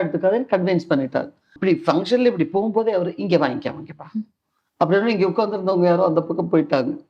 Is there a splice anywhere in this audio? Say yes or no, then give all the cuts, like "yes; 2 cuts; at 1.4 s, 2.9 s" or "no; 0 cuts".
yes; 1 cut; at 1.5 s